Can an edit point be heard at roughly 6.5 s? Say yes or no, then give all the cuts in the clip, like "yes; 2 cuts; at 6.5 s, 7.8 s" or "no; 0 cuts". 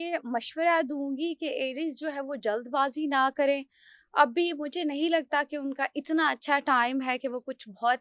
no; 0 cuts